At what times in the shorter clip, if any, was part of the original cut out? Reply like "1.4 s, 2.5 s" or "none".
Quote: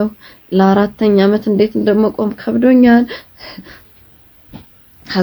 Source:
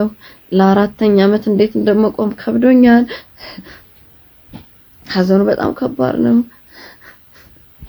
none